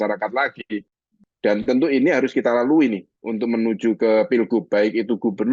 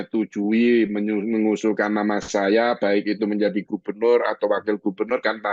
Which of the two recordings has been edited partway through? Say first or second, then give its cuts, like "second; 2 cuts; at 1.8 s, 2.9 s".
first; 1 cut; at 1.1 s